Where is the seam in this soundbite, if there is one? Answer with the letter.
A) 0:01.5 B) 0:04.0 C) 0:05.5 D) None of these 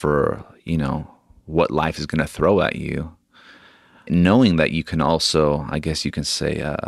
B